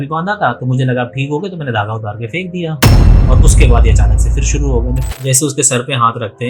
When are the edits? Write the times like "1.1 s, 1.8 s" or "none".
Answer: 5.1 s